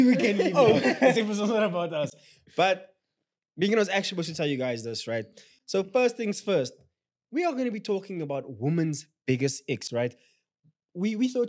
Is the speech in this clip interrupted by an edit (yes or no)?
no